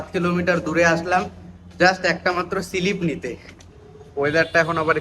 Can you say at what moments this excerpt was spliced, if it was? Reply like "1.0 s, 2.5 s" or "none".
3.5 s